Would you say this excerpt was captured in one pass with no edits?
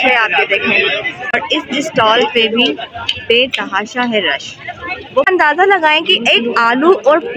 no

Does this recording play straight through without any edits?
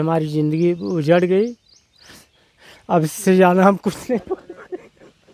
yes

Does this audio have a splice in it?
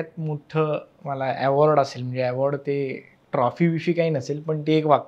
no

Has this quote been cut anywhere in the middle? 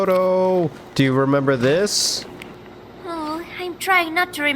yes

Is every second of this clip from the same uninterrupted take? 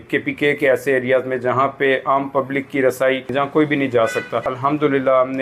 no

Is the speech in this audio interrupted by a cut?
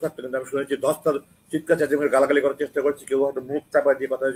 no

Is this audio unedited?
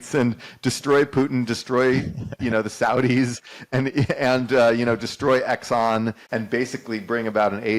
no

